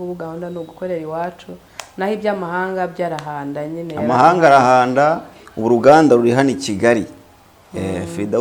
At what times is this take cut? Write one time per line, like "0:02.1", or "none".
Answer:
none